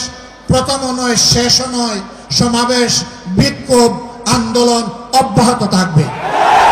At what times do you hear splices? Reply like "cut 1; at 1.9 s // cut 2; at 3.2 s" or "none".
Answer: none